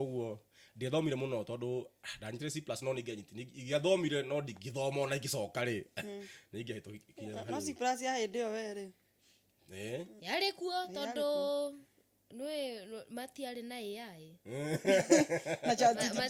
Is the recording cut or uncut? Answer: uncut